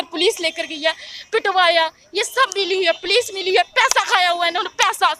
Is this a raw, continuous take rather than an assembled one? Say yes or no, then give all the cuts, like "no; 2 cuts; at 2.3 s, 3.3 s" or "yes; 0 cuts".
yes; 0 cuts